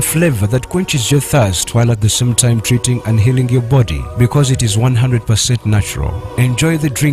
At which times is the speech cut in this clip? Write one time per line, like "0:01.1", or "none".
0:05.9